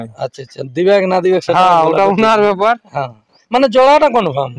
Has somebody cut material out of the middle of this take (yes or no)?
no